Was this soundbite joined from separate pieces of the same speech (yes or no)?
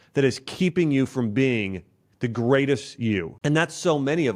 yes